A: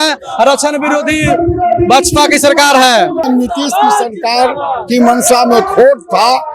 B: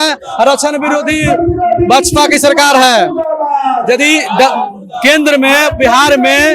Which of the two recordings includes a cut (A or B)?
A